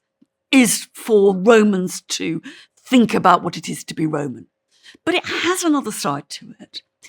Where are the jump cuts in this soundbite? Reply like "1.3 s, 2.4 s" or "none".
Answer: 1.4 s